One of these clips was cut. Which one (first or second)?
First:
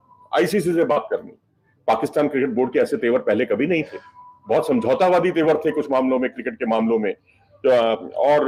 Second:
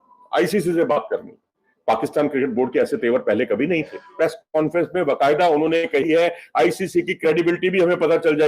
second